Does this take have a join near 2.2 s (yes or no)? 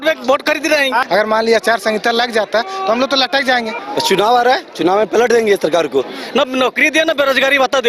no